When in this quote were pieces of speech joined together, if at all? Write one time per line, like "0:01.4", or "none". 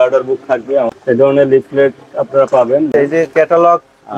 0:00.9
0:02.9